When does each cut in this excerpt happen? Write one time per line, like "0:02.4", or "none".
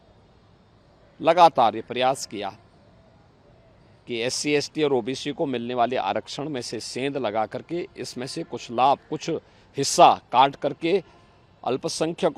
none